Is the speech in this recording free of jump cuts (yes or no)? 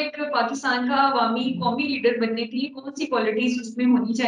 yes